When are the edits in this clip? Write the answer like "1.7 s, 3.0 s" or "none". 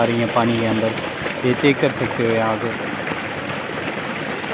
none